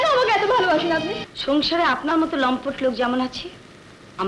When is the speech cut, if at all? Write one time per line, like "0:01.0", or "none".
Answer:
0:01.2